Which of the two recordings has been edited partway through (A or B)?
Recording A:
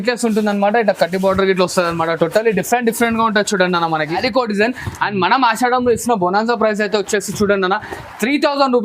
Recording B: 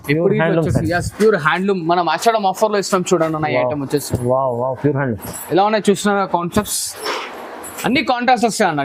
A